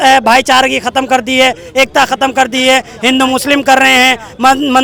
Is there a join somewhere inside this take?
no; 0 cuts

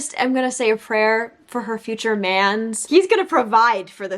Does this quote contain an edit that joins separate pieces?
yes; 1 cut; at 2.8 s

